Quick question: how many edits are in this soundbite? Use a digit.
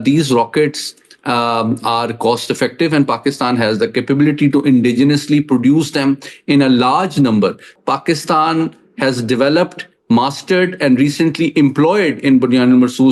1